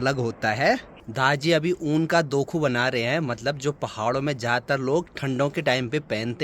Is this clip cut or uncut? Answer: cut